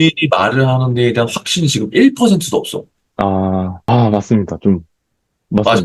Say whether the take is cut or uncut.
cut